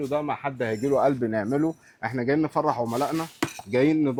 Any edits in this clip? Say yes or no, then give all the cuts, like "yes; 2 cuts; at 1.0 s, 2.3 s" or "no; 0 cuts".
no; 0 cuts